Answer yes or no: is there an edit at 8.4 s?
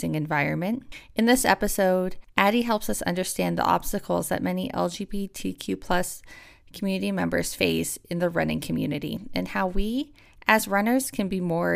no